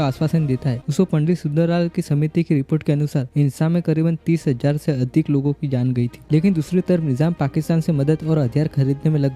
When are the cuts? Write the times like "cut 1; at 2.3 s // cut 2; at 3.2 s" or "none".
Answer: cut 1; at 0.8 s // cut 2; at 6.2 s